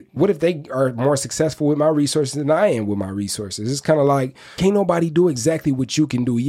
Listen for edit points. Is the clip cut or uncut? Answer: uncut